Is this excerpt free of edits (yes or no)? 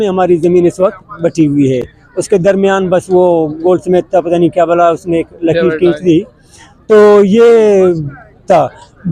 yes